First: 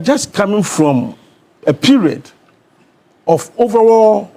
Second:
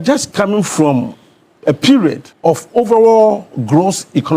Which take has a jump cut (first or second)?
second